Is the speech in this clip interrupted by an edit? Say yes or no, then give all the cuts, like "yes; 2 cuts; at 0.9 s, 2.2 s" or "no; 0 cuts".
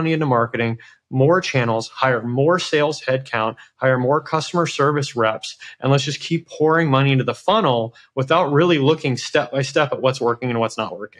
no; 0 cuts